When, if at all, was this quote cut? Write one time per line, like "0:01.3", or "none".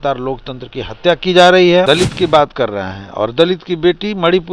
0:01.9

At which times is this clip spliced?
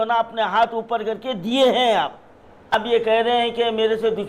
0:02.8

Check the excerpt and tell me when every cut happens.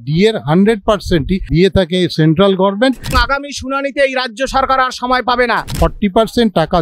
0:01.5
0:03.2
0:05.7

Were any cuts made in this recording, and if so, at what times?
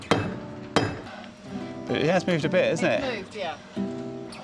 0:01.1

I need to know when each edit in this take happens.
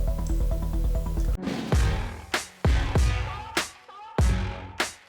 0:01.2

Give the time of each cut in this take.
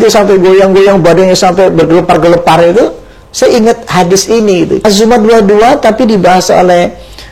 0:04.8

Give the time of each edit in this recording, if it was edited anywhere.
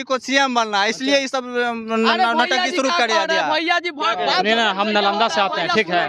none

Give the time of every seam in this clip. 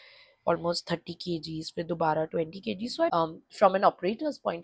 0:03.1

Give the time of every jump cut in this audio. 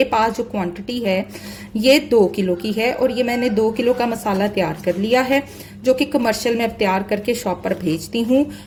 none

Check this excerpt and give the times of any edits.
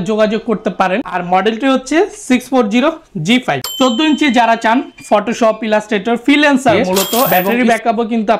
0:01.1
0:07.4

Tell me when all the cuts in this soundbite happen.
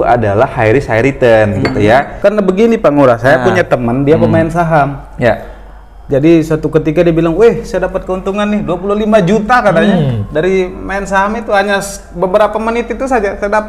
0:02.1

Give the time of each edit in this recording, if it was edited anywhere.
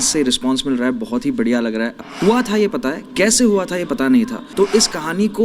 0:02.0
0:04.4

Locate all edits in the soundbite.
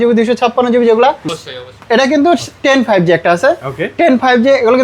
0:01.4

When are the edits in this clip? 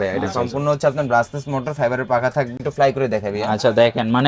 0:02.6

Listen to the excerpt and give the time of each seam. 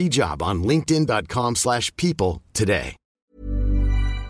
0:03.3

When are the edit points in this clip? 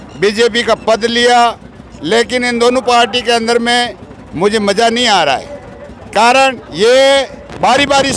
none

